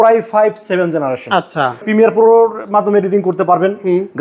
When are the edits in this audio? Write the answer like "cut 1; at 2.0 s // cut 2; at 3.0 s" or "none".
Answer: cut 1; at 1.8 s